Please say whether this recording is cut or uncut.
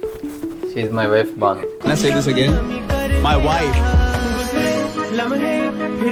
uncut